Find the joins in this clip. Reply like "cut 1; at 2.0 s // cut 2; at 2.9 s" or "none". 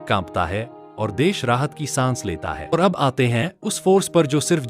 cut 1; at 2.7 s